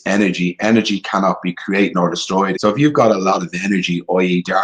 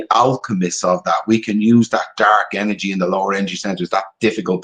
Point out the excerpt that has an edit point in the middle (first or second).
first